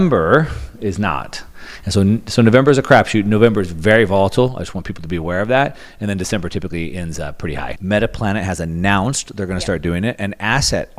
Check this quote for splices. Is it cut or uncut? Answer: cut